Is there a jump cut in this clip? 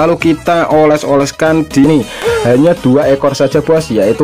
yes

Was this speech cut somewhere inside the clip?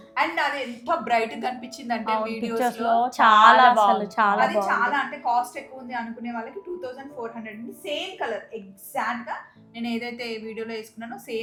no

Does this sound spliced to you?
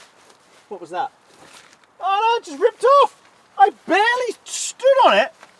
no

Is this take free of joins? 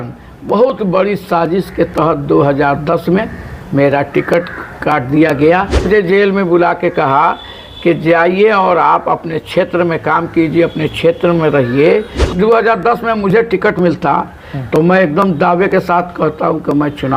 no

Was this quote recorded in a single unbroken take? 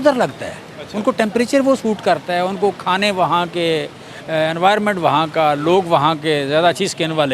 yes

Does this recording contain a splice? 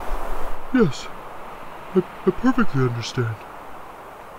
no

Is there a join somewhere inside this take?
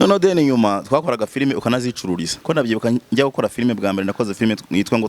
yes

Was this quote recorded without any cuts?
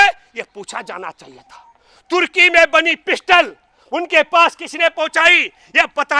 yes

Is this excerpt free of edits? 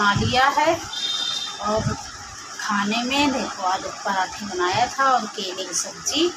yes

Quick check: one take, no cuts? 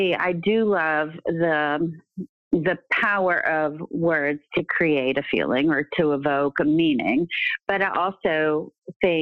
yes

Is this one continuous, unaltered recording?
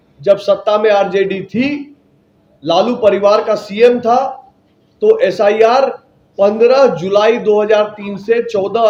yes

